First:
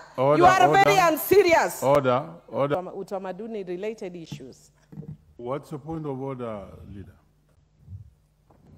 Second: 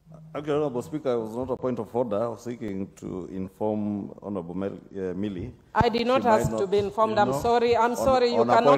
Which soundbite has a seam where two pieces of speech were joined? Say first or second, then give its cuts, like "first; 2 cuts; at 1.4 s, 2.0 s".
first; 1 cut; at 2.7 s